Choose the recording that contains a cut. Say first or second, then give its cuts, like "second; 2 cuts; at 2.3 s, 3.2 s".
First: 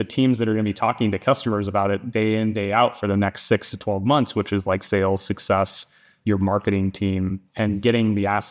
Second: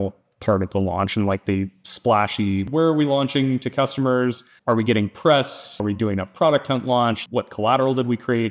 second; 4 cuts; at 2.6 s, 4.5 s, 5.8 s, 7.2 s